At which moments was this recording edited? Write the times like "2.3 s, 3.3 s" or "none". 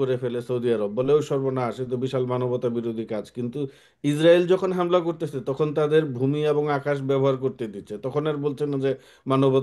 none